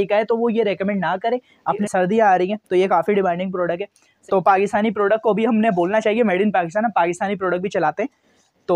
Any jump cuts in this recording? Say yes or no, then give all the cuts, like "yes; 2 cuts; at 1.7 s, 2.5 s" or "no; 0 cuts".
yes; 2 cuts; at 1.8 s, 4.1 s